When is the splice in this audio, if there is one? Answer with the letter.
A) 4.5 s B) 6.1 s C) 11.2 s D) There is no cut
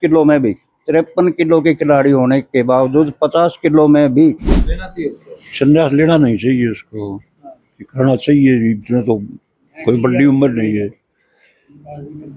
A